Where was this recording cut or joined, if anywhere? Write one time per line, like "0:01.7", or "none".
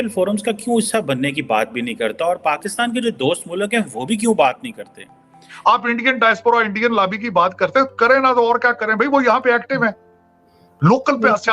0:05.4

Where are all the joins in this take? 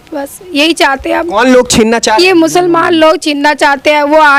none

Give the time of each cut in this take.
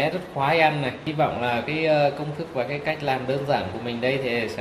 0:01.0

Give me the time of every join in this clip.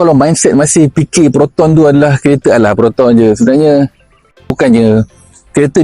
0:04.5

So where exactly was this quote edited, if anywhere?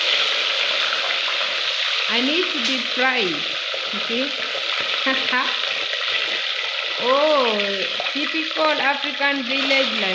none

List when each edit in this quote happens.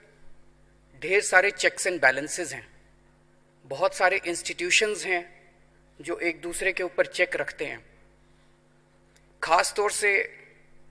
none

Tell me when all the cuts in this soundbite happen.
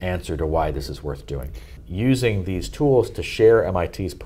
0:01.8

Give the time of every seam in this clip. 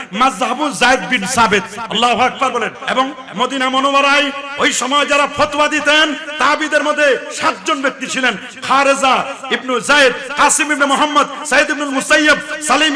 0:02.8

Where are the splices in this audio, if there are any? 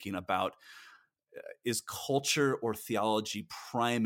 none

